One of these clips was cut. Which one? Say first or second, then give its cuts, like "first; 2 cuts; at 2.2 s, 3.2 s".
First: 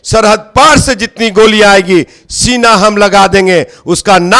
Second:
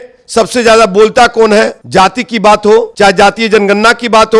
second; 2 cuts; at 1.8 s, 2.9 s